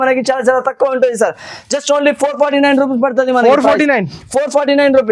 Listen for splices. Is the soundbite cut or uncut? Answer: uncut